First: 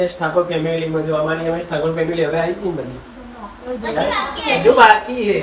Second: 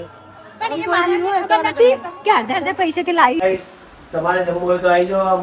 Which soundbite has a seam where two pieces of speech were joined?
second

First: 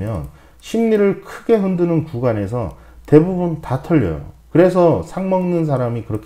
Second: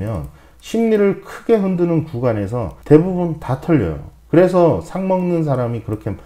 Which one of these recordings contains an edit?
second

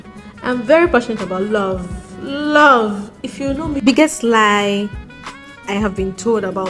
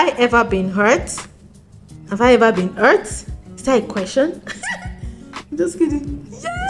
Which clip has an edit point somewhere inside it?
first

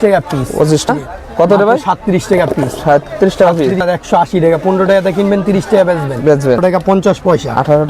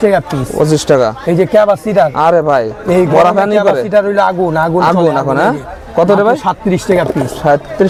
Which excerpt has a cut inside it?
first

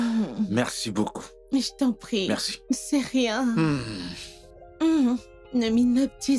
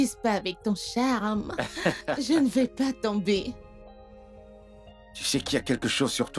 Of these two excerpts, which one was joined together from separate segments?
second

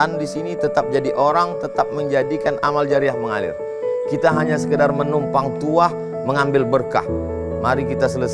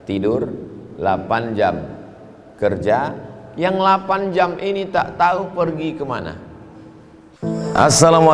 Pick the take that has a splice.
second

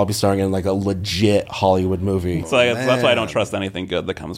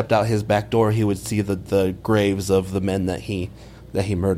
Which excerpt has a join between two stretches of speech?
first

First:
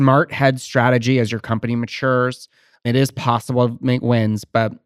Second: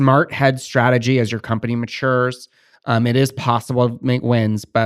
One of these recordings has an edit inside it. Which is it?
first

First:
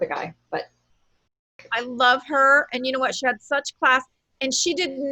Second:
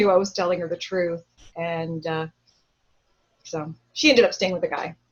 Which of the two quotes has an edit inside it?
first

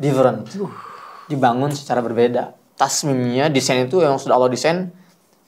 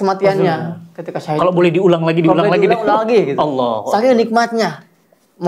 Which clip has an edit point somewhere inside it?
first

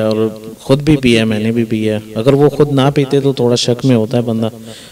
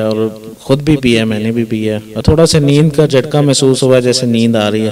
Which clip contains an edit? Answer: second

